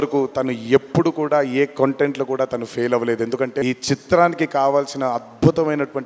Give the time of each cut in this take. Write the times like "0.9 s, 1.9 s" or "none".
3.6 s